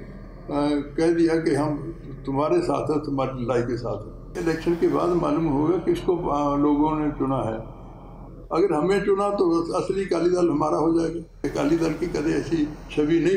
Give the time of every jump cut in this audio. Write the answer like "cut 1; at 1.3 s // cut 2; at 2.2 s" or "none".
cut 1; at 4.4 s // cut 2; at 11.4 s

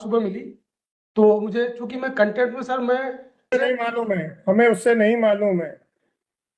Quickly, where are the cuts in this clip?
cut 1; at 3.5 s

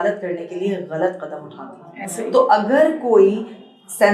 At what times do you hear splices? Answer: none

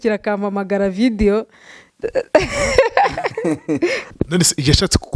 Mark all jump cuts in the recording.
cut 1; at 4.0 s

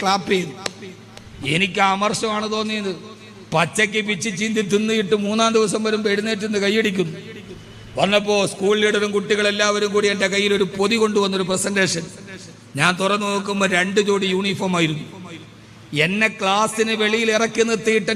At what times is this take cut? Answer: none

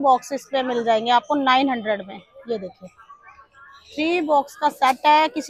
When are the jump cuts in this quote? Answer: none

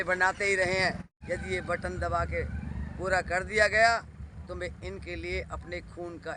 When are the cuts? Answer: cut 1; at 1.1 s

